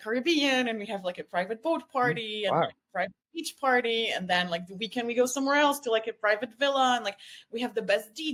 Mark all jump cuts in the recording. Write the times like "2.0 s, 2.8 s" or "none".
none